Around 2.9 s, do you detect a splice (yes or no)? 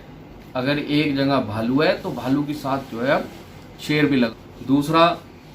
no